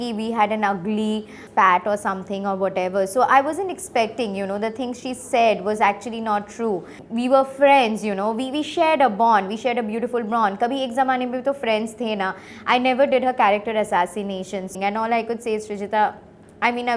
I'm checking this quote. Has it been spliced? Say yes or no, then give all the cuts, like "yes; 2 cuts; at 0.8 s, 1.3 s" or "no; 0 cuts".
yes; 3 cuts; at 7.0 s, 12.5 s, 14.8 s